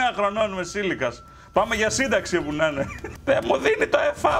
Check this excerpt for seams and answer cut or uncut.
uncut